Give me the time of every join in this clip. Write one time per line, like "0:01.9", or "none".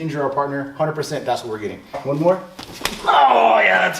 0:02.0